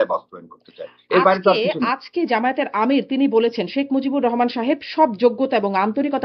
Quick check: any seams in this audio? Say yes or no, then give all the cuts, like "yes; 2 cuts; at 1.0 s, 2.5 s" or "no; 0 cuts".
no; 0 cuts